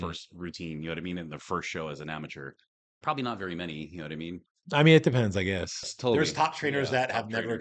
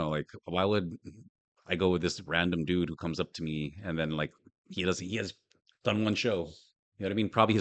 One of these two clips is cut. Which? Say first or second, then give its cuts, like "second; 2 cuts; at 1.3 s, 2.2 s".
first; 2 cuts; at 4.5 s, 5.9 s